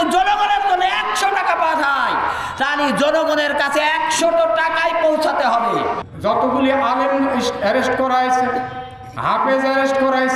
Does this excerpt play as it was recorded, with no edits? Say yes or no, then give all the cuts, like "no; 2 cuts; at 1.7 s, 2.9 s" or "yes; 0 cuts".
no; 1 cut; at 6.0 s